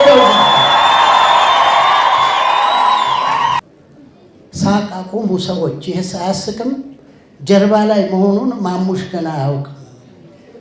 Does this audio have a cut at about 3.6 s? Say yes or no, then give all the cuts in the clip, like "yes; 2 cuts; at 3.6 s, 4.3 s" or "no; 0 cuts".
yes; 1 cut; at 3.6 s